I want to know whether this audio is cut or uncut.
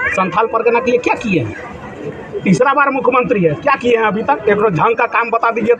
uncut